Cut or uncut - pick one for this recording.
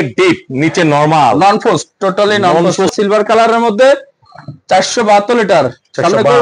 cut